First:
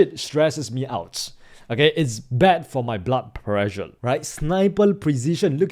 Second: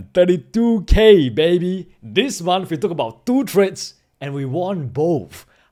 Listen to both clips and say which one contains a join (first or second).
first